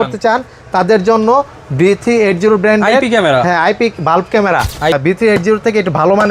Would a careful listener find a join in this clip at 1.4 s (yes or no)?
no